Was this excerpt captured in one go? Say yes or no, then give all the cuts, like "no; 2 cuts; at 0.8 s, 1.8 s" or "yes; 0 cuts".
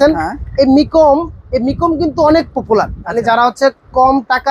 no; 1 cut; at 3.0 s